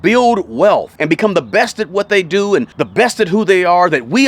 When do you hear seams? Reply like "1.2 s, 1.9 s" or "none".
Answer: 0.9 s, 2.8 s